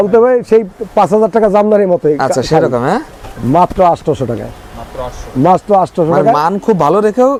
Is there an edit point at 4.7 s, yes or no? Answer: no